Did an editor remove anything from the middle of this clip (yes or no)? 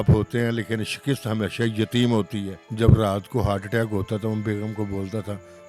yes